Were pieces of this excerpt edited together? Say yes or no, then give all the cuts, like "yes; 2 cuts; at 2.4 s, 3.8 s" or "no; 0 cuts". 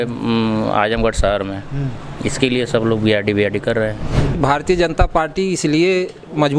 yes; 1 cut; at 4.4 s